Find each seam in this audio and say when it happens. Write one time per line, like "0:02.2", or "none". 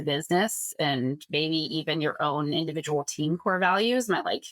none